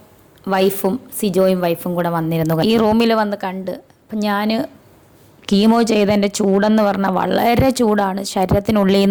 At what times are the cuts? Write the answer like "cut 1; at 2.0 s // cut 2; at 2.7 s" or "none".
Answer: none